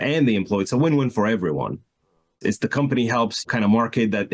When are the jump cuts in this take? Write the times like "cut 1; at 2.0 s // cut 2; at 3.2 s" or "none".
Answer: cut 1; at 2.4 s // cut 2; at 3.4 s